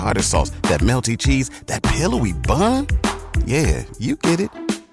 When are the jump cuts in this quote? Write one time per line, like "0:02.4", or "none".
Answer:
none